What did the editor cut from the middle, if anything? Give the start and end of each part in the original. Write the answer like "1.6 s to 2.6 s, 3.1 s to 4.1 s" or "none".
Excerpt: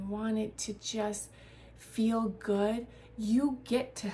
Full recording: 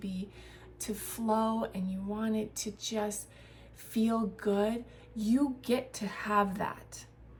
none